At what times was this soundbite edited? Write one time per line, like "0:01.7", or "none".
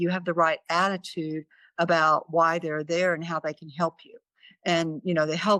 none